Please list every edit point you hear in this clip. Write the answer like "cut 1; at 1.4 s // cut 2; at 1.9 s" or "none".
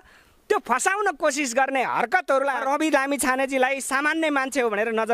cut 1; at 2.6 s